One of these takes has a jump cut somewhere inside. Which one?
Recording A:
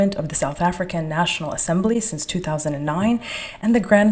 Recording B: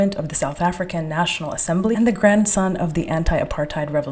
B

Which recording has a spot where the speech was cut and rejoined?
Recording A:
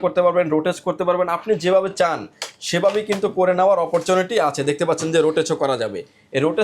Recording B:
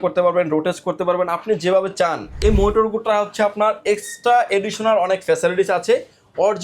B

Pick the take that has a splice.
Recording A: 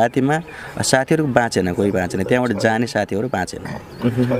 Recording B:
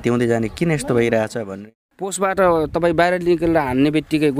B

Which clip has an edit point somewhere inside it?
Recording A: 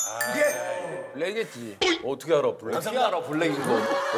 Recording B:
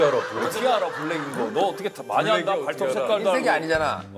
A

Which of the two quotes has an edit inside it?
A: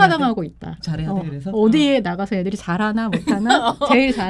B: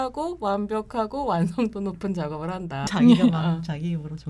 B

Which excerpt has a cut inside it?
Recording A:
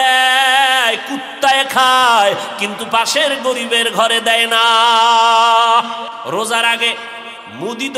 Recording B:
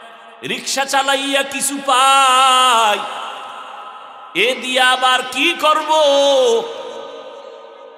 A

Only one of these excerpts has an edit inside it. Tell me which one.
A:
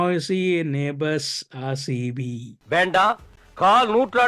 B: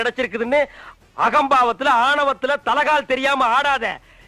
A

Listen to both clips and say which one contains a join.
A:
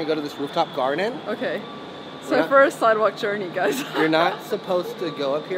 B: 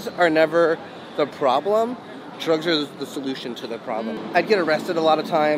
B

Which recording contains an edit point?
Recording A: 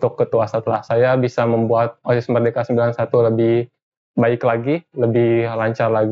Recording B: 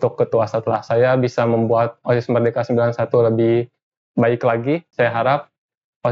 B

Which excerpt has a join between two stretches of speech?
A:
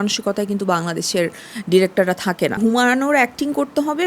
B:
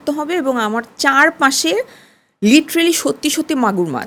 A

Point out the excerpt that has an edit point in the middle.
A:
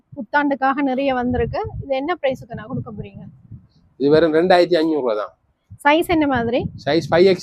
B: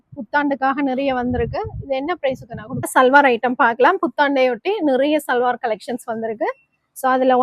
B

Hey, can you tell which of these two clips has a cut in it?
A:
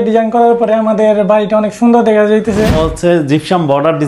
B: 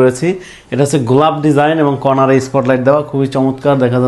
A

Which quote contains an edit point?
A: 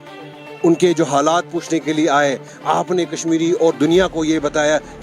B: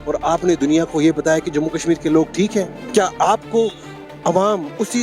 B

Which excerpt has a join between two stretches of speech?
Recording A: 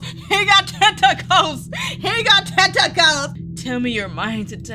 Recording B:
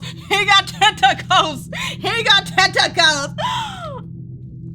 A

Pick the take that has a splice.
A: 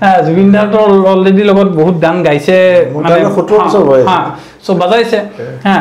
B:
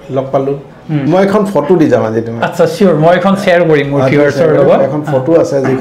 B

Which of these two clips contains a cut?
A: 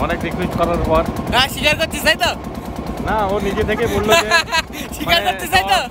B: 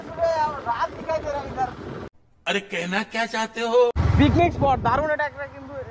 B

